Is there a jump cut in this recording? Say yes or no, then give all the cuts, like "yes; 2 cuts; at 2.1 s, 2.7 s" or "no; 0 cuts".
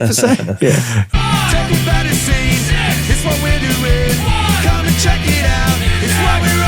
yes; 1 cut; at 1.0 s